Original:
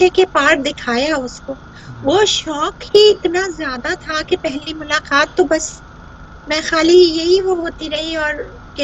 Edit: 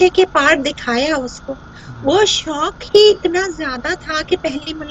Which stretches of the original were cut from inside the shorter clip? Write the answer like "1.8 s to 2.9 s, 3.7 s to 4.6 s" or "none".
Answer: none